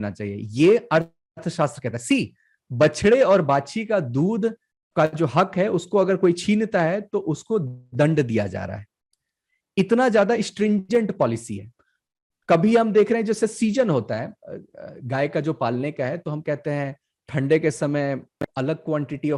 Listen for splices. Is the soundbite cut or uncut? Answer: uncut